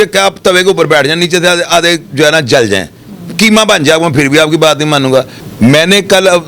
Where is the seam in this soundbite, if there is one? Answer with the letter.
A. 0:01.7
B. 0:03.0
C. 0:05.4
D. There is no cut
C